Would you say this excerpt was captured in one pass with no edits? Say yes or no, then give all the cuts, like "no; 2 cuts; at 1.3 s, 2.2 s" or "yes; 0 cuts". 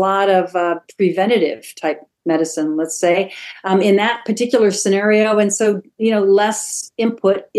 yes; 0 cuts